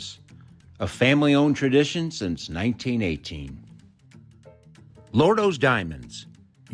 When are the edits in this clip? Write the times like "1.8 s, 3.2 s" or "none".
3.5 s, 5.1 s